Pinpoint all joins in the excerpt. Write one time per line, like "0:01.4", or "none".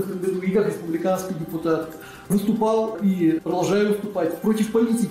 0:03.0